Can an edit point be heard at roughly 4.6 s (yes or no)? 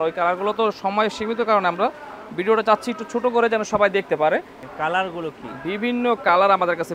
yes